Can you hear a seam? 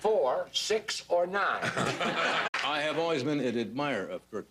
no; 0 cuts

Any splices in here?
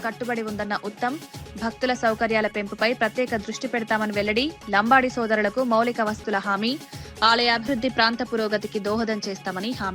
no; 0 cuts

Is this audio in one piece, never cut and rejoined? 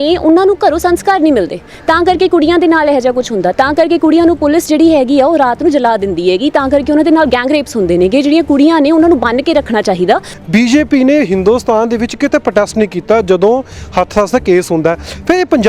no; 1 cut; at 10.3 s

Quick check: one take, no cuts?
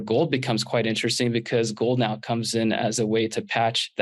yes; 0 cuts

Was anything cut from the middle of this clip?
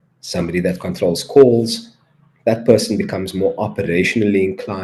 no; 0 cuts

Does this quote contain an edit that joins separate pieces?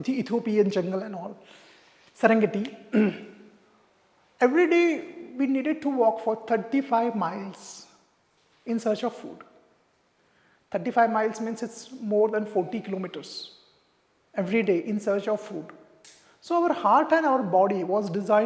no; 0 cuts

